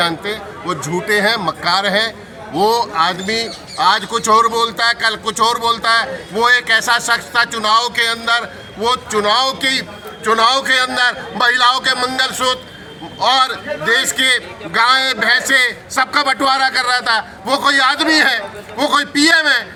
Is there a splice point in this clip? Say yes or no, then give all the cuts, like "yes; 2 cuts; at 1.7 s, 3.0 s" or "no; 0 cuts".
no; 0 cuts